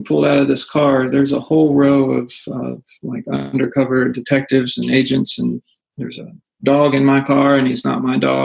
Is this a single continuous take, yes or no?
yes